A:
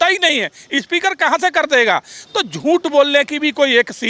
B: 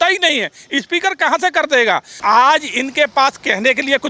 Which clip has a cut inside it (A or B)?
B